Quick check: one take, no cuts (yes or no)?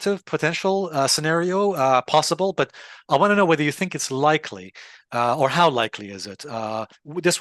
yes